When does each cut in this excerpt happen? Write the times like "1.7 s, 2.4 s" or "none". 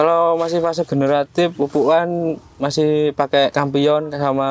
1.5 s, 3.5 s